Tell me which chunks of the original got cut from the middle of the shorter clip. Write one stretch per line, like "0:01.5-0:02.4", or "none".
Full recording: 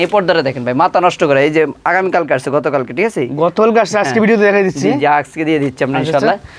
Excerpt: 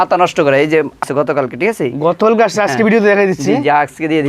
0:01.9-0:02.4

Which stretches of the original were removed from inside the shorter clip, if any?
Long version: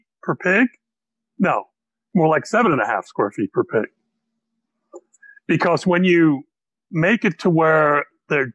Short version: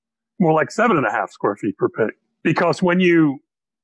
0:04.0-0:05.3

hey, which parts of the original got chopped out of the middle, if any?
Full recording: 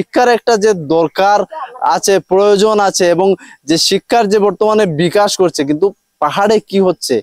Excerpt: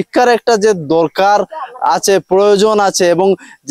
none

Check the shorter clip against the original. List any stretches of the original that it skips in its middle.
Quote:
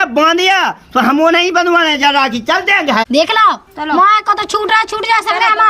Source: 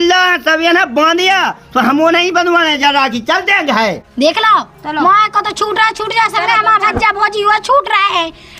0:03.8-0:04.1

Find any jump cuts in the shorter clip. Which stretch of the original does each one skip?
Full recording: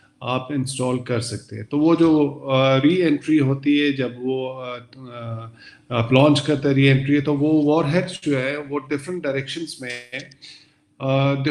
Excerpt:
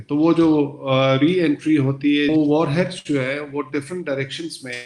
0:03.9-0:07.5

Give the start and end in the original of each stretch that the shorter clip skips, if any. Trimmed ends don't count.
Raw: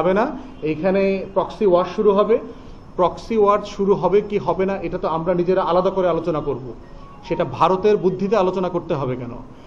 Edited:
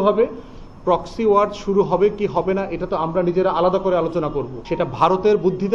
0:06.7-0:07.2

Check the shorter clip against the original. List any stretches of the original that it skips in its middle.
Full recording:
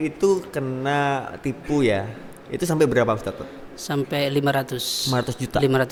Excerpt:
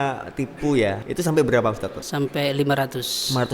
0:02.1-0:02.5
0:03.4-0:03.7

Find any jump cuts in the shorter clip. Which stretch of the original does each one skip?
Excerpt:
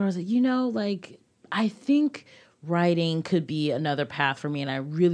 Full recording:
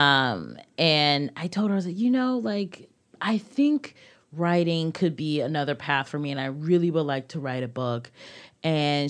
none

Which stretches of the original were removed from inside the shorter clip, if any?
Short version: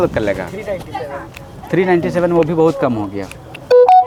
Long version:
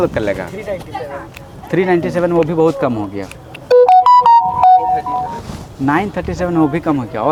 none

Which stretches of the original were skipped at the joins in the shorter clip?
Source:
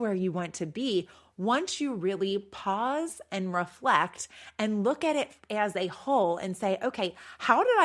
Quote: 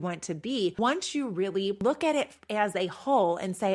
0:01.1-0:01.4
0:02.5-0:04.8

